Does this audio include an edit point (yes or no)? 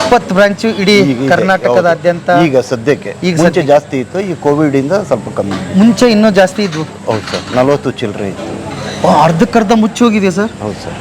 no